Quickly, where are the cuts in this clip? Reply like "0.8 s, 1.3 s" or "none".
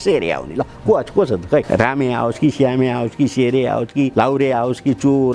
1.7 s, 4.1 s